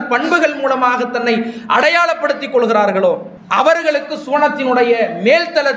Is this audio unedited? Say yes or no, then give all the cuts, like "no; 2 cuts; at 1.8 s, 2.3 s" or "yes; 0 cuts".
yes; 0 cuts